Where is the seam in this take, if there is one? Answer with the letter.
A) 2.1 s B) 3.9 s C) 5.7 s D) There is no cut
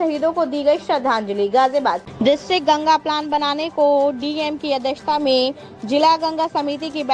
A